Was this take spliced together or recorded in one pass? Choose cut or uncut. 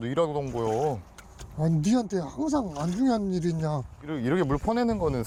uncut